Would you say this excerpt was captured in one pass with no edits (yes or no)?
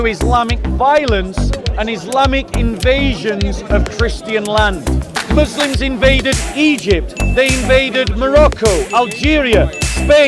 no